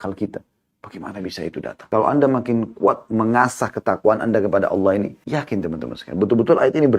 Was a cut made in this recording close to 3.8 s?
no; 2 cuts; at 1.8 s, 5.2 s

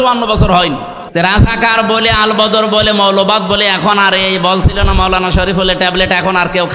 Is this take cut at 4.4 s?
no; 1 cut; at 0.9 s

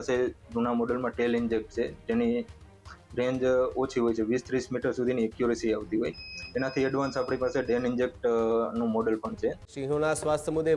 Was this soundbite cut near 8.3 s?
no; 1 cut; at 9.7 s

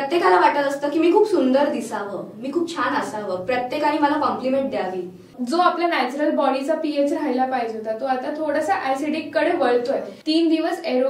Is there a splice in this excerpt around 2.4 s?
no; 2 cuts; at 5.3 s, 10.1 s

